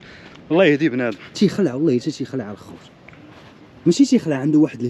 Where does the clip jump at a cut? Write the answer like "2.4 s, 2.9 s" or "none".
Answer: 1.2 s